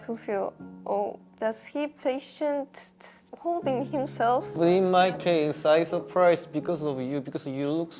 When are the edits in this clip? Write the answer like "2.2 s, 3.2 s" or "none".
none